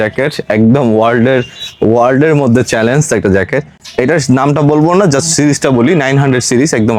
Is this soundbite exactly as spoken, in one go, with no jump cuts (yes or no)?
yes